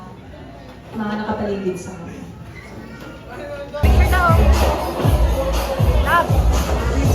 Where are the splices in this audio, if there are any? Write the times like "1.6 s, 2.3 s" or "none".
3.8 s